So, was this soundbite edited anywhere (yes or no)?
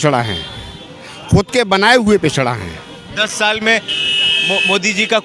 no